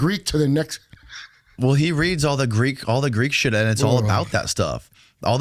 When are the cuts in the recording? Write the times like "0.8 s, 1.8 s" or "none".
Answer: none